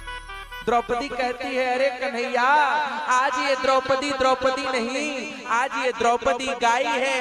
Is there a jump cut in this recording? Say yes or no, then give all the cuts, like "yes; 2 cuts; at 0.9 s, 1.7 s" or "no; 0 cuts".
no; 0 cuts